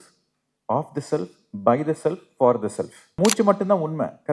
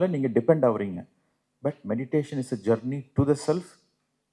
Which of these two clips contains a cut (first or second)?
first